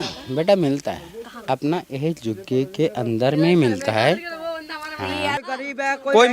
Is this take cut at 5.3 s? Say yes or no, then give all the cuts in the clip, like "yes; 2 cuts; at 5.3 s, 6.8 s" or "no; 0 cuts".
yes; 1 cut; at 5.3 s